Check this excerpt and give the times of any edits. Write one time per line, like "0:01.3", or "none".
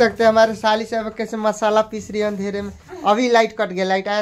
none

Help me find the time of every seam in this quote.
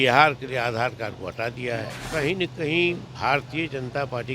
0:02.1

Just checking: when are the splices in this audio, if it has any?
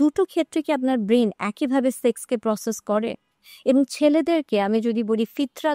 none

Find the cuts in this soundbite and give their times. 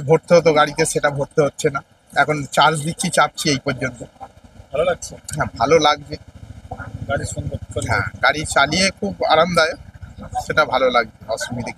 none

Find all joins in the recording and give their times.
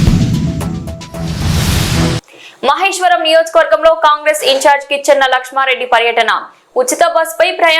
0:02.2

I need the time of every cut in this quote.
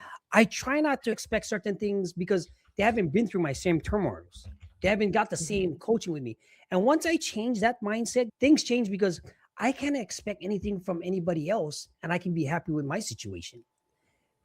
0:01.2
0:08.3

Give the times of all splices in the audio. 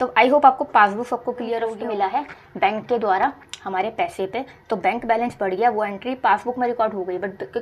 0:01.8

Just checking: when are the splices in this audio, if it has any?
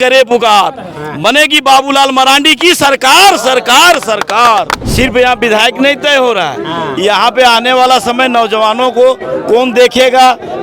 0:04.8

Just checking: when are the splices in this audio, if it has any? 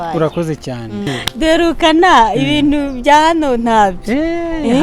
0:01.2

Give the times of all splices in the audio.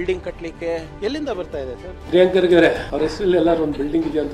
0:00.9
0:01.9
0:02.9

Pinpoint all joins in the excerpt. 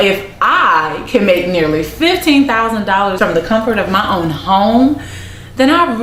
0:03.2

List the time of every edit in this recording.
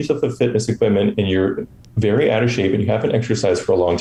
none

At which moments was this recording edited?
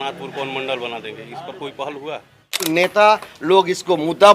0:02.7

